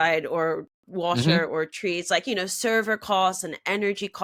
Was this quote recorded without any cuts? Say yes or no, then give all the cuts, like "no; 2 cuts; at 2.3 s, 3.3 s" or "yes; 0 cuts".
yes; 0 cuts